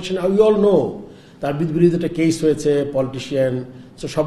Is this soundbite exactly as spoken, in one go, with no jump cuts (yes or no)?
yes